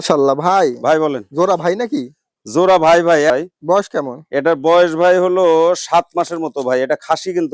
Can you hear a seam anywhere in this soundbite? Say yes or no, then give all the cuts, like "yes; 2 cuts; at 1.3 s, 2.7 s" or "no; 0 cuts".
yes; 1 cut; at 3.3 s